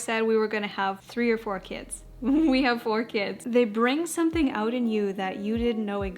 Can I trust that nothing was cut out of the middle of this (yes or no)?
no